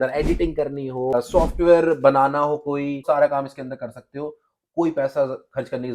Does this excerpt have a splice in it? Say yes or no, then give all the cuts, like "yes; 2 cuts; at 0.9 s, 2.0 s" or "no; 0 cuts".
yes; 2 cuts; at 1.1 s, 3.0 s